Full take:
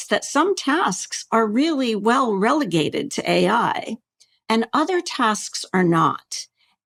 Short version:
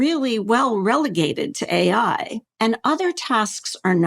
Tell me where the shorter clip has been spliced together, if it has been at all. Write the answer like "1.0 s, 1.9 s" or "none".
2.4 s

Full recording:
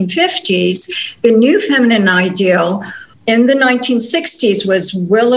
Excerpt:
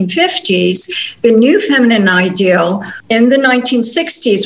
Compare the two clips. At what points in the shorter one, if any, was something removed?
2.9 s

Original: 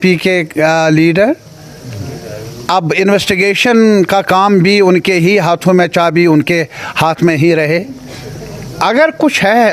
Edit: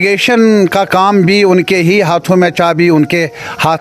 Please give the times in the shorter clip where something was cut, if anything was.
none

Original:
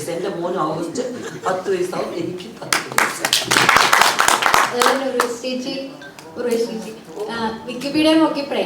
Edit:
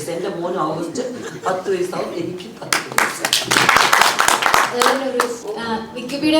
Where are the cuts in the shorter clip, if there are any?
5.4 s

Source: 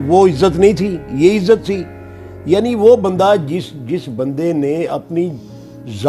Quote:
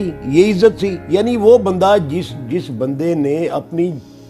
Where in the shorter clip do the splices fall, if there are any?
0.9 s

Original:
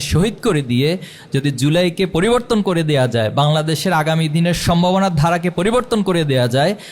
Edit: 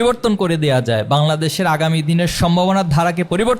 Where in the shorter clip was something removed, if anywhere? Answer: none

